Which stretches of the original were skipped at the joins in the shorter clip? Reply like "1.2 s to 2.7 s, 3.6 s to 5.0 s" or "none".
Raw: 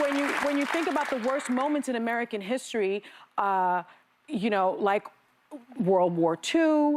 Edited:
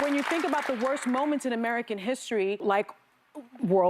3.0 s to 4.8 s